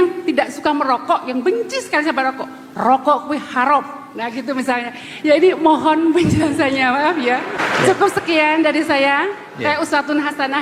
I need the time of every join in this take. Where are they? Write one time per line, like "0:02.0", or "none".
none